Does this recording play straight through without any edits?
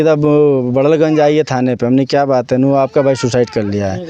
yes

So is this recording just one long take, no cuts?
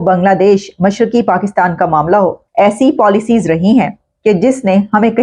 no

